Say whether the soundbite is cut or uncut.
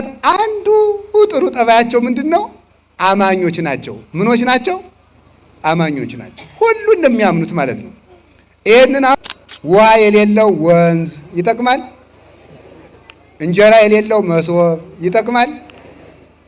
cut